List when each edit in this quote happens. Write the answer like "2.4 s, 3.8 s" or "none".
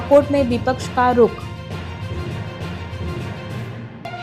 none